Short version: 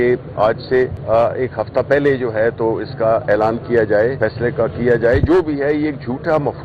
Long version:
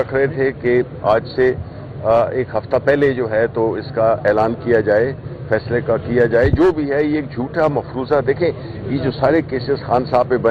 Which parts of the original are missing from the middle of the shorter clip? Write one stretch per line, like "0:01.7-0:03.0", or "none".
0:01.6-0:01.9
0:05.1-0:05.4